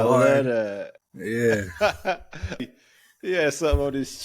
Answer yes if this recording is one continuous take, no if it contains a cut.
no